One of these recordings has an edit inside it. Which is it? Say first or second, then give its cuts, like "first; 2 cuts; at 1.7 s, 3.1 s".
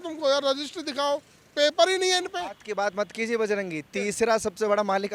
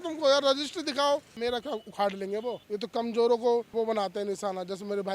second; 3 cuts; at 1.3 s, 2.6 s, 3.7 s